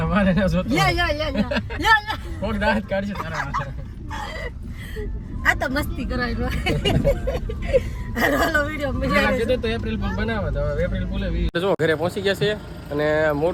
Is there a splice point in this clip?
no; 0 cuts

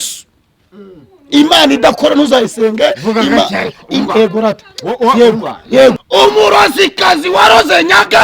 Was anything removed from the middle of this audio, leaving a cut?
yes; 1 cut; at 6.0 s

